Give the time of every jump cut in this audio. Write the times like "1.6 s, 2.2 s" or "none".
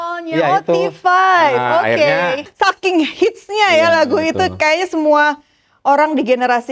2.5 s

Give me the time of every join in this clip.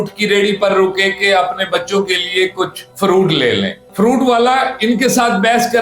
3.8 s

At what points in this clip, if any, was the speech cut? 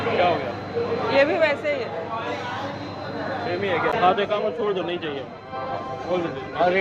none

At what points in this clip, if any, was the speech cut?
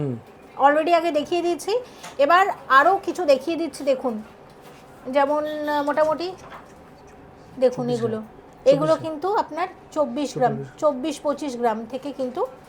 none

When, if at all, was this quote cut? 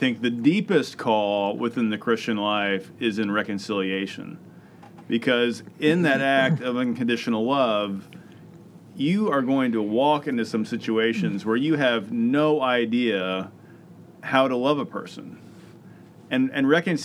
none

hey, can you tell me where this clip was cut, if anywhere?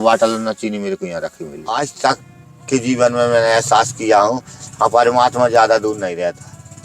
1.6 s

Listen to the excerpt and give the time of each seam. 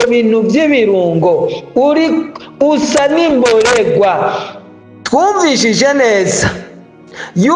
4.9 s

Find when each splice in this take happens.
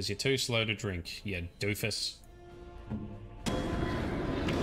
none

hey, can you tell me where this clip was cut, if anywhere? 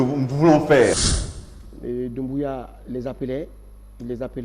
1.1 s

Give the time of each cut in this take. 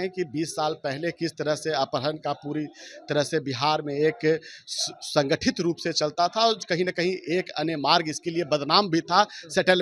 none

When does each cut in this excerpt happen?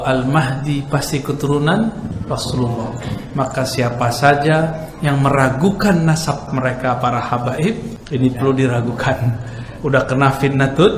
2.1 s, 6.5 s, 7.9 s

